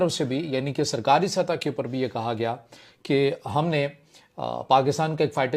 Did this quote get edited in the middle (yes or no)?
no